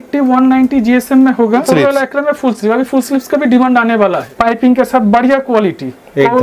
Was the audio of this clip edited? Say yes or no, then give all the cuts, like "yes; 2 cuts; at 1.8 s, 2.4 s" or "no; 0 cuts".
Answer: yes; 2 cuts; at 1.6 s, 4.3 s